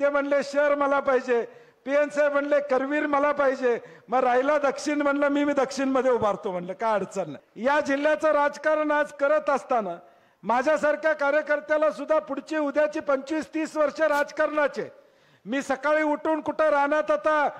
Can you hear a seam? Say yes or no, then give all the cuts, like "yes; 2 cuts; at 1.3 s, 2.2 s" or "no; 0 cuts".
yes; 1 cut; at 7.4 s